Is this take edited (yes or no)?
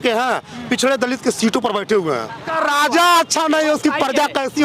yes